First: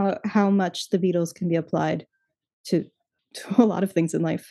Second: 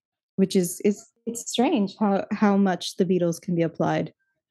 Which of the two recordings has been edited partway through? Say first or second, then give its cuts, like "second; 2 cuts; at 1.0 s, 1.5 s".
second; 1 cut; at 1.1 s